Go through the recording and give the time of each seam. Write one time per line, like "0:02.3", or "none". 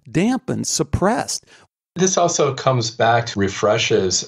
0:02.0
0:03.3